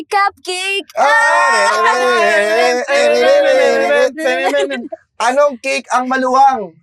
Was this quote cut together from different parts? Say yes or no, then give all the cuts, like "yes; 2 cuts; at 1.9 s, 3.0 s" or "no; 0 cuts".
no; 0 cuts